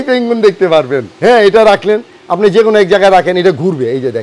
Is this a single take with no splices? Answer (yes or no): no